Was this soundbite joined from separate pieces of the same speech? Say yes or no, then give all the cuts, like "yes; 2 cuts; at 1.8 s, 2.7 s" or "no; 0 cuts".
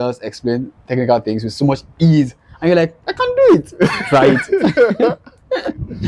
no; 0 cuts